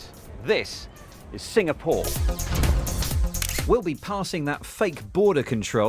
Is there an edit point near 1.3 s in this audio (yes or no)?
no